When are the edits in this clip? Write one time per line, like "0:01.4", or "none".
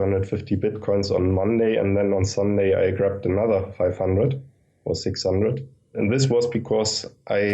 0:05.9